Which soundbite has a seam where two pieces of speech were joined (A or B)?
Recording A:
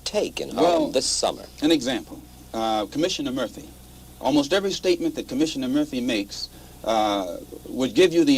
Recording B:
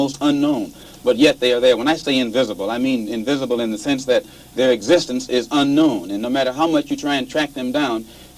A